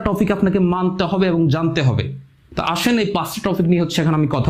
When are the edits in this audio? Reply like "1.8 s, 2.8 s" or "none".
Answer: none